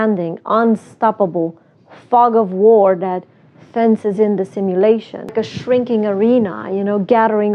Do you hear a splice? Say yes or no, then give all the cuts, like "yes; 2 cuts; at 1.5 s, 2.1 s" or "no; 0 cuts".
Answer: yes; 1 cut; at 5.3 s